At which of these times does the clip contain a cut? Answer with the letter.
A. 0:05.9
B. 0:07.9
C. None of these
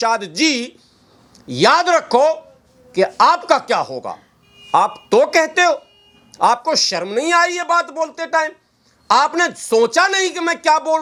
C